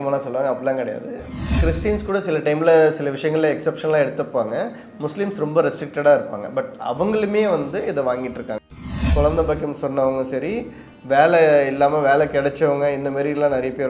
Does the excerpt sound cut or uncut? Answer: cut